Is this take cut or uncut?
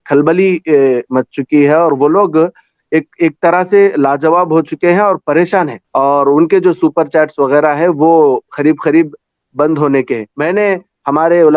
cut